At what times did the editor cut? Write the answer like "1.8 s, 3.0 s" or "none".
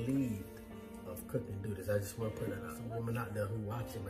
2.7 s